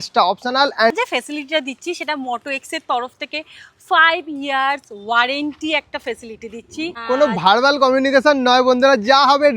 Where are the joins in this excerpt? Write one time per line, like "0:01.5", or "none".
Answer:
0:00.9
0:07.0